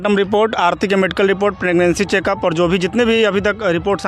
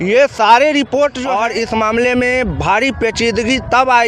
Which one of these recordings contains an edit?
second; 1 cut; at 1.3 s

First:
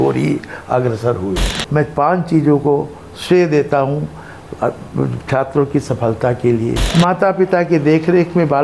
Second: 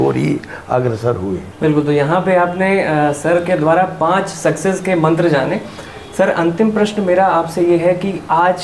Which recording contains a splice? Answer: first; 2 cuts; at 1.5 s, 6.8 s

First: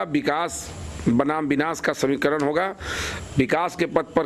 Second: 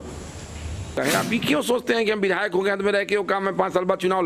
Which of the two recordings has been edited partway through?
second; 1 cut; at 1.0 s

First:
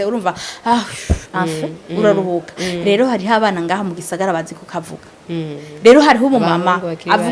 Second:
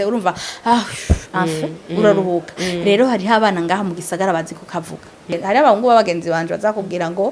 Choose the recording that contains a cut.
second; 1 cut; at 5.3 s

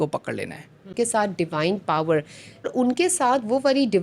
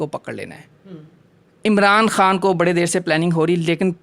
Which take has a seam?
first; 2 cuts; at 0.9 s, 2.7 s

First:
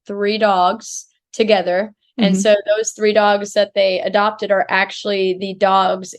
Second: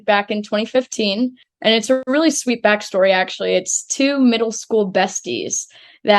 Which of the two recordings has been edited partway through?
second; 1 cut; at 1.4 s

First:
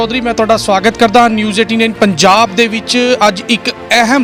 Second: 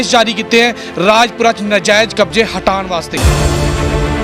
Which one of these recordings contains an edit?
second; 1 cut; at 3.1 s

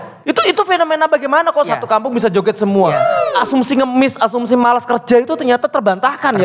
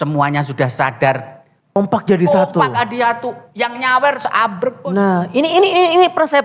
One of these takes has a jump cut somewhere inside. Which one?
second; 1 cut; at 1.8 s

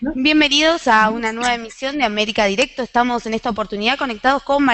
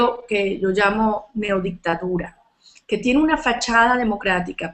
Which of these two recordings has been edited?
second; 1 cut; at 1.1 s

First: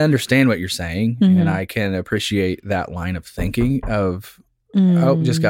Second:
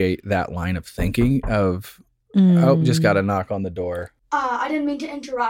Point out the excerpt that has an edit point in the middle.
second; 1 cut; at 4.1 s

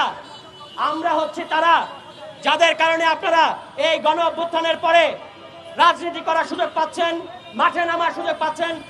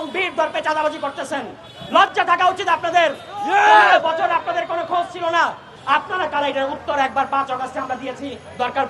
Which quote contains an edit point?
second; 1 cut; at 5.7 s

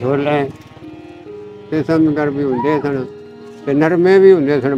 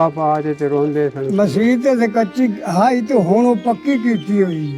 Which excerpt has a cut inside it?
second; 1 cut; at 1.2 s

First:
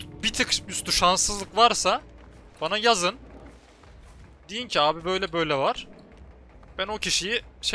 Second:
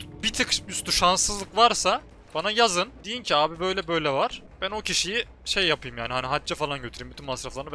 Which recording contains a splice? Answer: second; 3 cuts; at 2.2 s, 3.1 s, 4.5 s

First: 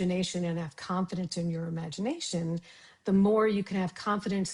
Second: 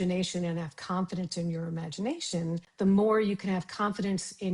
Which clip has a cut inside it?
second; 1 cut; at 2.7 s

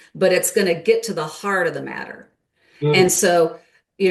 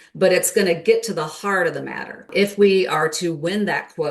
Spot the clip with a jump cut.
second; 1 cut; at 2.3 s

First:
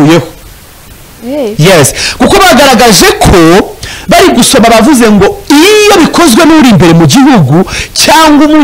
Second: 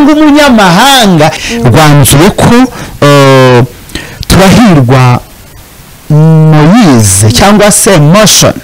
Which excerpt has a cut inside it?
second; 1 cut; at 1.4 s

